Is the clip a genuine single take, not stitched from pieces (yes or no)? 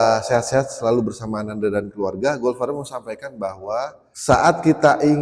no